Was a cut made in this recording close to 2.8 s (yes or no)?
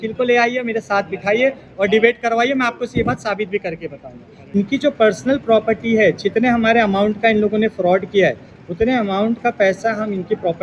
no